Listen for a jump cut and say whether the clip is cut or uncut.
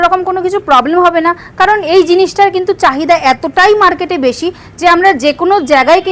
uncut